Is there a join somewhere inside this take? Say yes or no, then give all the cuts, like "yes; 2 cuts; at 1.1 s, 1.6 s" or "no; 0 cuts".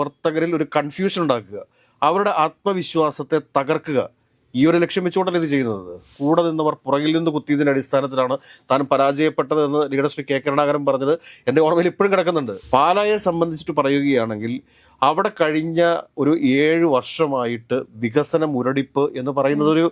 yes; 2 cuts; at 6.1 s, 12.5 s